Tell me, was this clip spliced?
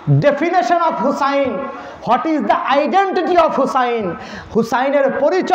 no; 0 cuts

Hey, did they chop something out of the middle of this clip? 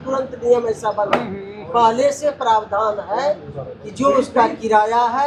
no; 0 cuts

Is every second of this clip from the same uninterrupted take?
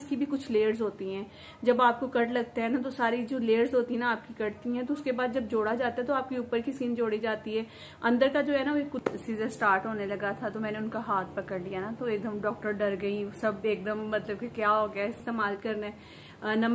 no; 2 cuts; at 9.0 s, 15.2 s

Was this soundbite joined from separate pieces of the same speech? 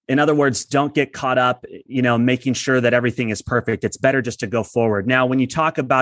no; 0 cuts

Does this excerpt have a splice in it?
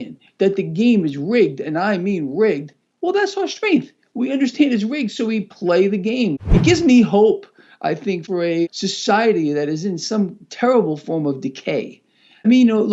yes; 1 cut; at 6.3 s

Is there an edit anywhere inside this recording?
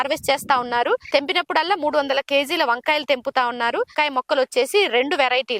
yes; 2 cuts; at 1.0 s, 3.9 s

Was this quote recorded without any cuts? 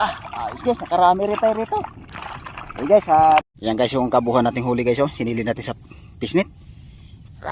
no; 1 cut; at 3.5 s

